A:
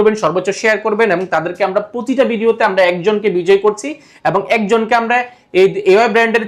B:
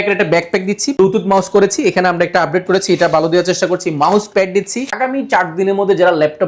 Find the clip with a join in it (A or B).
B